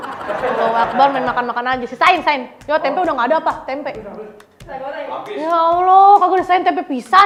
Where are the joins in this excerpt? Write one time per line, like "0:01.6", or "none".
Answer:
none